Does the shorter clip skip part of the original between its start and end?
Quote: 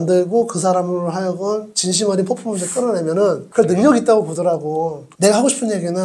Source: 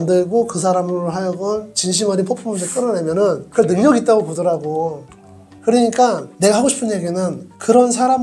yes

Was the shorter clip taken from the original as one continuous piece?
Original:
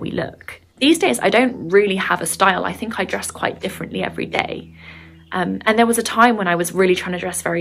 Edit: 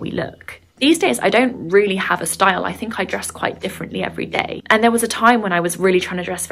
no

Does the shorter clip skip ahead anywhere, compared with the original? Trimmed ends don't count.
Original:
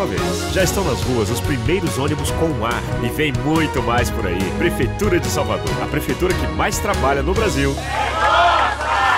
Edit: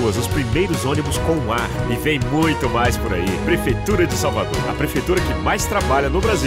no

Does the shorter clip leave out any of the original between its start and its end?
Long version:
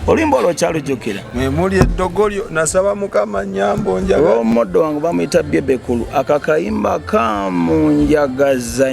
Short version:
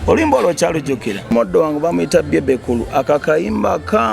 yes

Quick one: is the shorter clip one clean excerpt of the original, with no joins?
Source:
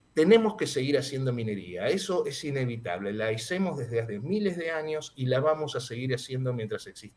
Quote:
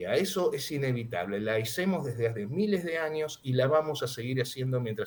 yes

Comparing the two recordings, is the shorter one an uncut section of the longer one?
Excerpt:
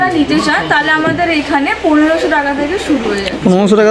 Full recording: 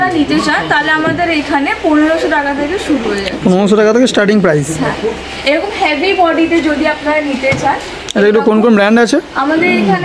yes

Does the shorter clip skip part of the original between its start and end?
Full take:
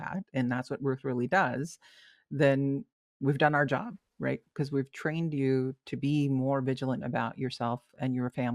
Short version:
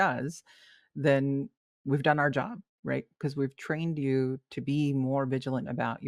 no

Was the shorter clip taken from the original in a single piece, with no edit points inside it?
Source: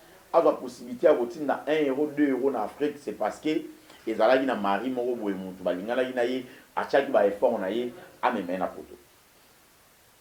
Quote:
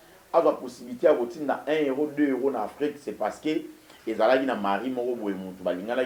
yes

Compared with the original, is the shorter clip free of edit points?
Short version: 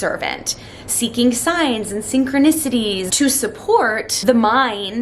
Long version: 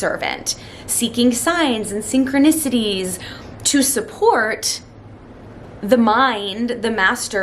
no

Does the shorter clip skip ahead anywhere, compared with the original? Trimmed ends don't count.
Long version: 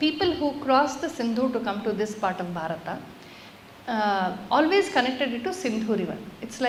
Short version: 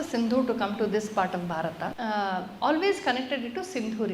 yes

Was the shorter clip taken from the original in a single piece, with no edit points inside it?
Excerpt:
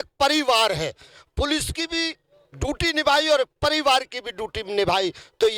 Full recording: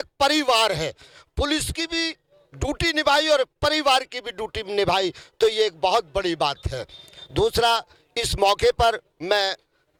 yes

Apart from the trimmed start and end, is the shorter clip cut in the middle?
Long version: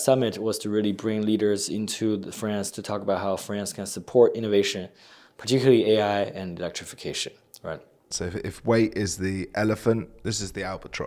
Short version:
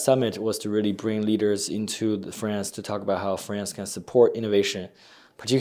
no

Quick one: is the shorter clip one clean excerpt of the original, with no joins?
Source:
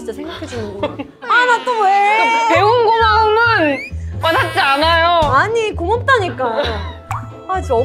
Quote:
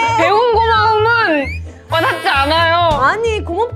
yes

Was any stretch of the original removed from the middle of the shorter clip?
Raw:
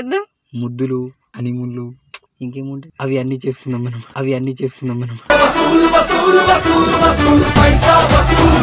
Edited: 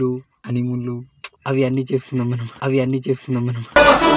yes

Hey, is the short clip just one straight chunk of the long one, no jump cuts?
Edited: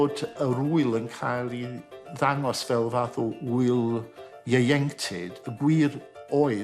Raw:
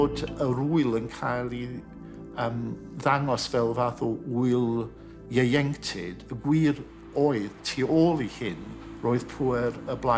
no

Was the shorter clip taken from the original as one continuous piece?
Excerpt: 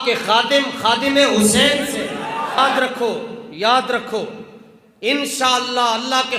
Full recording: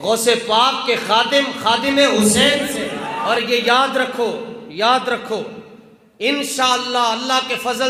no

